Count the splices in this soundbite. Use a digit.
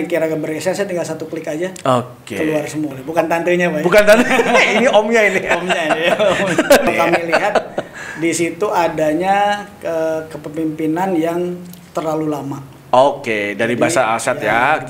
2